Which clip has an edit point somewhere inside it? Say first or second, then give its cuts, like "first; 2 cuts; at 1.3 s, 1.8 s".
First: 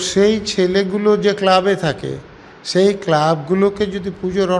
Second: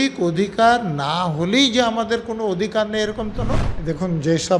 second; 1 cut; at 3.7 s